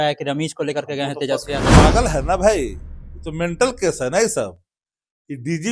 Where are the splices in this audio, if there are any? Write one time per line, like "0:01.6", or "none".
0:01.7